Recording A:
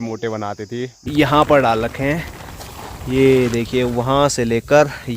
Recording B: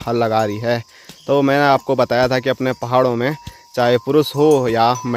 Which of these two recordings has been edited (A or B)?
A